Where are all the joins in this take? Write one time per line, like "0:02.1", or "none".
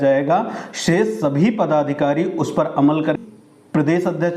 0:03.2